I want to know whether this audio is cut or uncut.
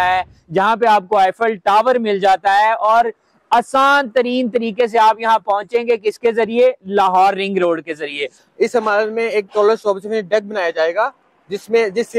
cut